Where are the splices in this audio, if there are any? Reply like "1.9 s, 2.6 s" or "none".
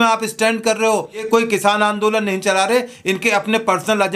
1.2 s